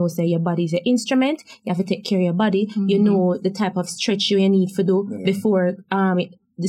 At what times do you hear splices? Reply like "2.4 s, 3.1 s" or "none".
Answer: none